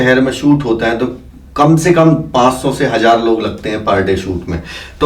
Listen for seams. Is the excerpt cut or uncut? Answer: uncut